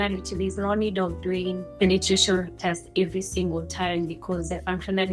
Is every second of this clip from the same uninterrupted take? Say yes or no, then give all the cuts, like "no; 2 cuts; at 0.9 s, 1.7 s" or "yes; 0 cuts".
no; 1 cut; at 1.7 s